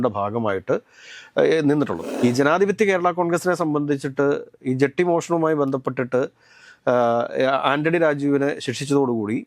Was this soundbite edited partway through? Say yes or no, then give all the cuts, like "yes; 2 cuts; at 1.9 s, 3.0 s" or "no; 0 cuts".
yes; 1 cut; at 2.0 s